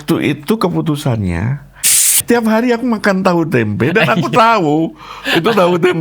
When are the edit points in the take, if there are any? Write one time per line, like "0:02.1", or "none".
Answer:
0:01.9